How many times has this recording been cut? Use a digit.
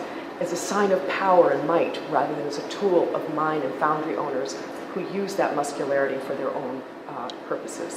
1